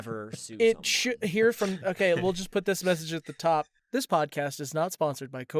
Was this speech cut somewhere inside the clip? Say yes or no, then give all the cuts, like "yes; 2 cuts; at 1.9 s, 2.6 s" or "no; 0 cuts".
yes; 1 cut; at 3.8 s